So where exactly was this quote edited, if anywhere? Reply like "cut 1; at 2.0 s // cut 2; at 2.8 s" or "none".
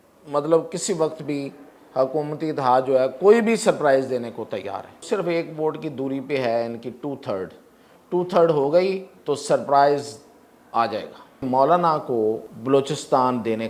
cut 1; at 4.9 s // cut 2; at 9.1 s // cut 3; at 11.4 s // cut 4; at 12.5 s